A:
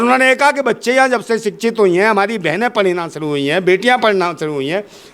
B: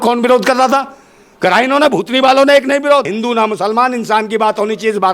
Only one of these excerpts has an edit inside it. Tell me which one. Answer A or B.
B